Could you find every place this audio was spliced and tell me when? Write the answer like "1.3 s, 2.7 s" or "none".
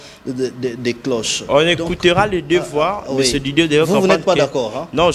none